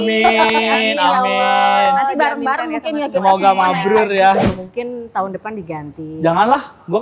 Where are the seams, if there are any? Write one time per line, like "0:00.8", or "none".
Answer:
0:04.6